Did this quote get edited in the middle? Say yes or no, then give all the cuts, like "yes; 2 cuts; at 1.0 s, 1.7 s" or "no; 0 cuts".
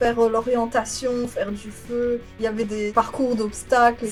no; 0 cuts